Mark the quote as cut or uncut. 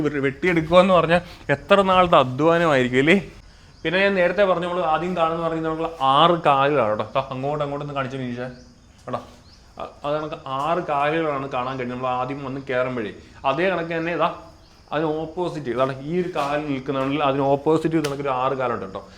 cut